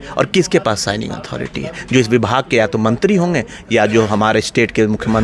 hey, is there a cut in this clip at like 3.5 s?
no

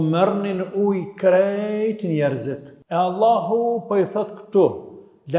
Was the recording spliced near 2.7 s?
yes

